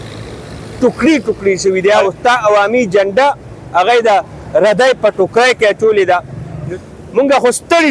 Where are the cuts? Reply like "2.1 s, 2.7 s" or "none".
2.0 s, 6.5 s